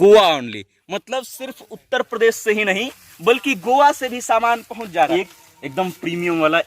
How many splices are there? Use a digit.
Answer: 1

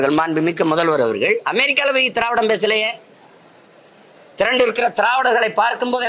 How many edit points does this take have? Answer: 0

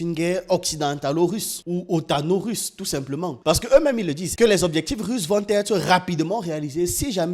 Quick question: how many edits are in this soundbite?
1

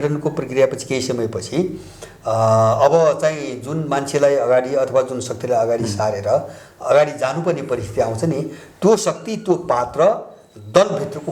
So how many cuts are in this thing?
0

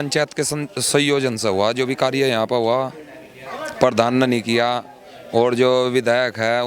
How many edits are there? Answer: 0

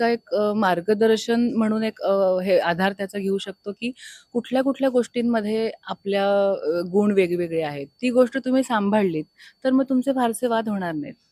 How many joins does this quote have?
0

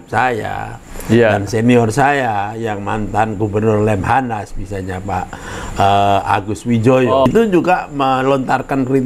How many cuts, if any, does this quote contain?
1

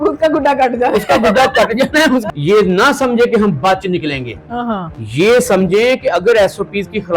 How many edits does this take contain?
1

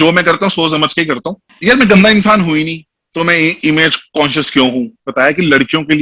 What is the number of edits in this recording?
2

